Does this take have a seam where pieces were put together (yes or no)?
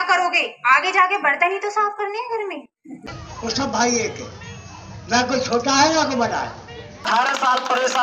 yes